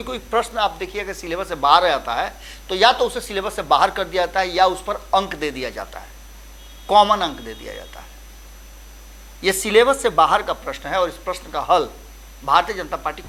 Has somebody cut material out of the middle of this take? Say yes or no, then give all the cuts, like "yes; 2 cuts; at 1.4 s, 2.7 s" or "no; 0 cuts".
no; 0 cuts